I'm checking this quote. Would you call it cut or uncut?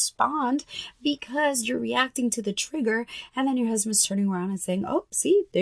uncut